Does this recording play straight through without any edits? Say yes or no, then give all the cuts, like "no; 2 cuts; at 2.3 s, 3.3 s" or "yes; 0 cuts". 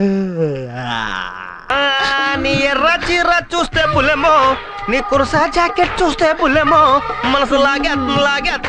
no; 1 cut; at 1.7 s